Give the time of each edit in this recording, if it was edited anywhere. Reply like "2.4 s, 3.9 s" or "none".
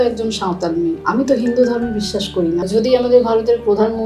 1.0 s, 2.7 s